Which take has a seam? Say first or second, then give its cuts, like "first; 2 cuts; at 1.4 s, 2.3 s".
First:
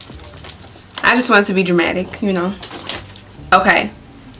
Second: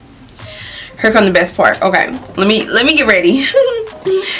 first; 1 cut; at 2.9 s